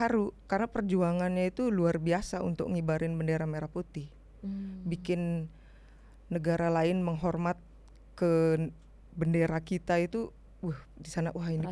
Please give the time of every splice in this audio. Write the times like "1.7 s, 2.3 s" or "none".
none